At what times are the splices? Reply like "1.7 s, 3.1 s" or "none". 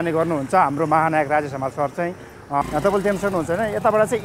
2.6 s

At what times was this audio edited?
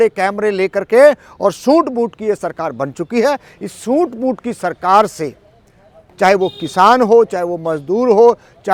none

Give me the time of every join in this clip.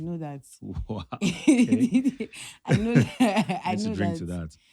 none

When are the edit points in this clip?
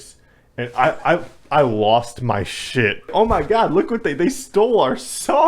3.1 s

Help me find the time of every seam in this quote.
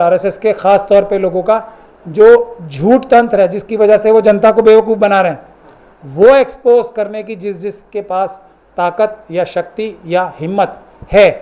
none

